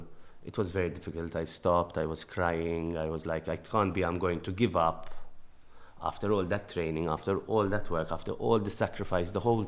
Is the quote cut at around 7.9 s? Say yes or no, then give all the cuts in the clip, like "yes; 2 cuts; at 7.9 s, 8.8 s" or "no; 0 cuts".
no; 0 cuts